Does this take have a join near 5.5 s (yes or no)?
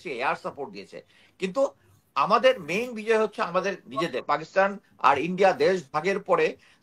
no